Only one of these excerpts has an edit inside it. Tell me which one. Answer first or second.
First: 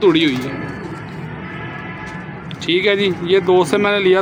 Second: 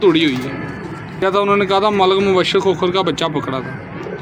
second